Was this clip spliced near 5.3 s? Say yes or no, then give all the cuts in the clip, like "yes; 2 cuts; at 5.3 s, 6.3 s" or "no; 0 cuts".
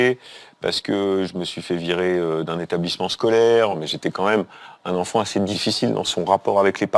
no; 1 cut; at 3.8 s